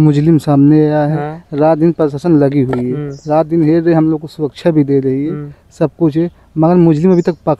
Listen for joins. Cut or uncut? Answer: uncut